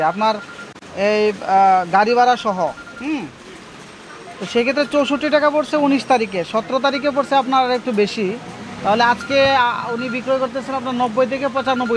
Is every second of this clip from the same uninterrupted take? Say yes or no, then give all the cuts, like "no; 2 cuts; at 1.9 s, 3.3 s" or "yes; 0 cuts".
yes; 0 cuts